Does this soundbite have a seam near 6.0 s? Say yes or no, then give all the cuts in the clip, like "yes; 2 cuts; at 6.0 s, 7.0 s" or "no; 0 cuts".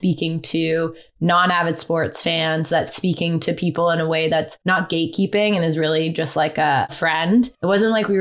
no; 3 cuts; at 2.9 s, 4.6 s, 7.3 s